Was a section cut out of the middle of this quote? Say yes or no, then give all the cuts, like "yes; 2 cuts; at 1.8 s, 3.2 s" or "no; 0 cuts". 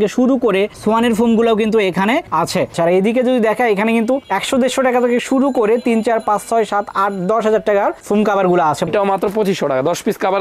yes; 2 cuts; at 2.7 s, 8.9 s